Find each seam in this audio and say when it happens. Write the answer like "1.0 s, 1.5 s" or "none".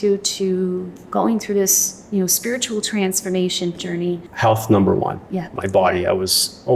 3.8 s, 5.5 s